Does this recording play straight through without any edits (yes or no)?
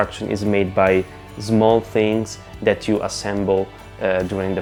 yes